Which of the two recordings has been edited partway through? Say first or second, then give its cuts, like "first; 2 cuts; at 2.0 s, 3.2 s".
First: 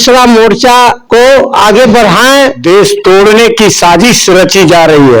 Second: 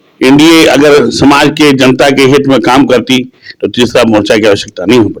first; 2 cuts; at 1.0 s, 2.6 s